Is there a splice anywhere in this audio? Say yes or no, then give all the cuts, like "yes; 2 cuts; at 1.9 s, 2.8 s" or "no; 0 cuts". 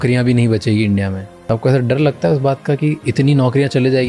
no; 0 cuts